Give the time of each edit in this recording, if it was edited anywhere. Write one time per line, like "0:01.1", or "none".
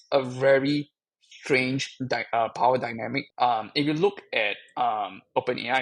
0:03.2